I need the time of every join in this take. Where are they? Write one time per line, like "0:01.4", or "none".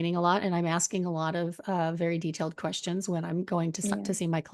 none